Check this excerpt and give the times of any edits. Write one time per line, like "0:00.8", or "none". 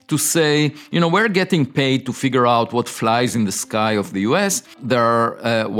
0:04.7